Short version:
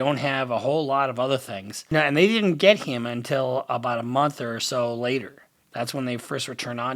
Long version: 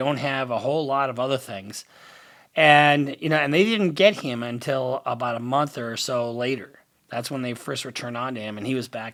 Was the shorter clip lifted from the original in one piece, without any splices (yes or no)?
no